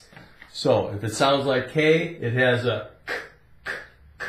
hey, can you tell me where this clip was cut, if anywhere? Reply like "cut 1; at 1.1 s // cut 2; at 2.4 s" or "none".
cut 1; at 1.3 s